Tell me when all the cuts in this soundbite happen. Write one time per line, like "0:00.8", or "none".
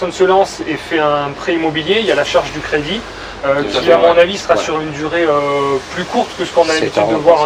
none